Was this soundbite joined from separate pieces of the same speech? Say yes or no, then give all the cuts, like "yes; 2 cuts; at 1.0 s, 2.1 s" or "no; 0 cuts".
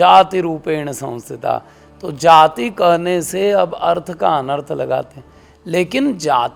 no; 0 cuts